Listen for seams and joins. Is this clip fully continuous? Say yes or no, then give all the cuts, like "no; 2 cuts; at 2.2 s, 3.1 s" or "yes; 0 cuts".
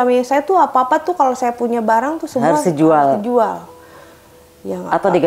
yes; 0 cuts